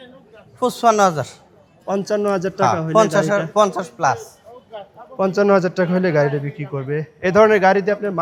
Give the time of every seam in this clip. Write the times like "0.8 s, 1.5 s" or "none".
none